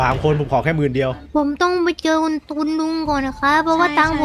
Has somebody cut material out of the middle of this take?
yes; 1 cut; at 1.2 s

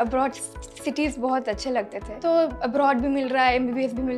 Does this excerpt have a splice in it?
yes; 1 cut; at 2.1 s

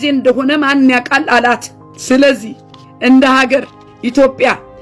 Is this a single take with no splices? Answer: yes; 0 cuts

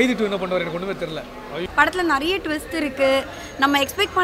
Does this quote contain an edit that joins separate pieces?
yes; 1 cut; at 1.7 s

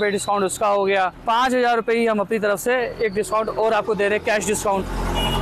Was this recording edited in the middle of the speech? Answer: no; 0 cuts

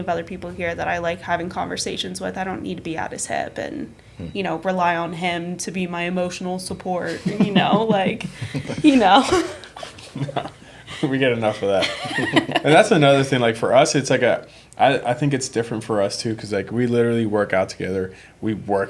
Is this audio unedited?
yes; 0 cuts

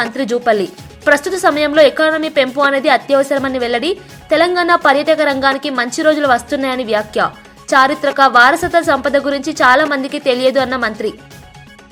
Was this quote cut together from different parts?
no; 0 cuts

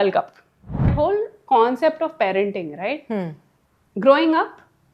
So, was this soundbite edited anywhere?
yes; 1 cut; at 0.9 s

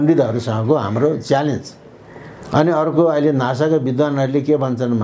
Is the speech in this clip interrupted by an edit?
no; 0 cuts

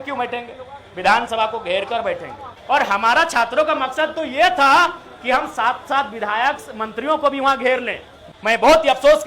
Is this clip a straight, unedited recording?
no; 2 cuts; at 2.5 s, 8.2 s

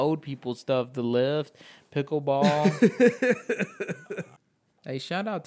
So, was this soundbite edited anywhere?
yes; 1 cut; at 4.3 s

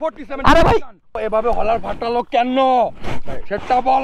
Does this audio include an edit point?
yes; 1 cut; at 1.2 s

